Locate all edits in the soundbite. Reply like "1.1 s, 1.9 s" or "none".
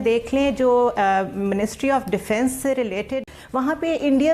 3.4 s